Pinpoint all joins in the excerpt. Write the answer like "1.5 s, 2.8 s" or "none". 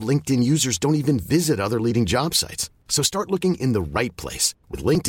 none